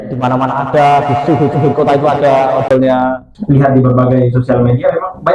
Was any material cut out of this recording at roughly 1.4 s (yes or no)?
no